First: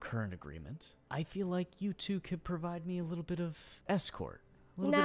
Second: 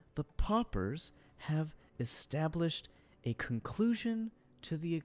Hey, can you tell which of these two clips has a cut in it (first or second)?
first